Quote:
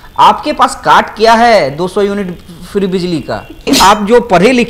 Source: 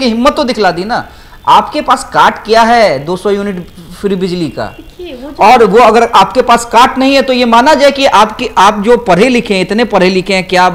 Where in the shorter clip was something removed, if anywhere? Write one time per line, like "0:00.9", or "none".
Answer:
0:03.6